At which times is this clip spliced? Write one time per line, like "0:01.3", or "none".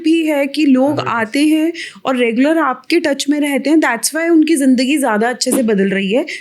none